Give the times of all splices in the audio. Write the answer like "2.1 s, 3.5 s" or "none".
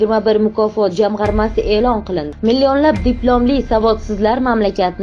2.3 s

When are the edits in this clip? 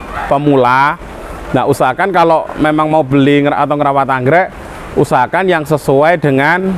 none

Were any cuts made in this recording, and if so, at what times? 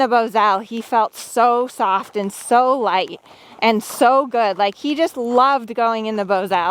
none

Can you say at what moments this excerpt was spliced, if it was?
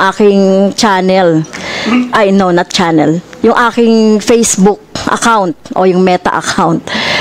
none

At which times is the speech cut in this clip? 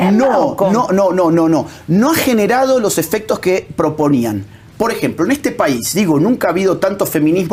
none

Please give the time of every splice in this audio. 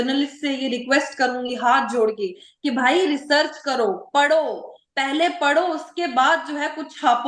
none

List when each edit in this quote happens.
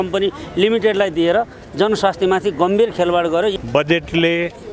3.5 s

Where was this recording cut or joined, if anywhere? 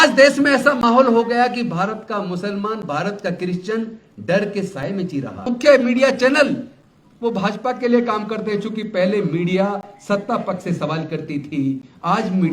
5.5 s

